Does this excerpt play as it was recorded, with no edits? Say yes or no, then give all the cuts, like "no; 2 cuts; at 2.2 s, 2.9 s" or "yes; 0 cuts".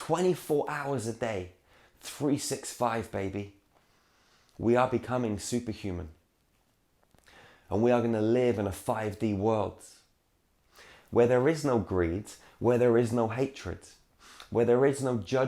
yes; 0 cuts